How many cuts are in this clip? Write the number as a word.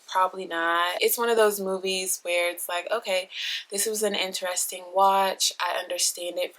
one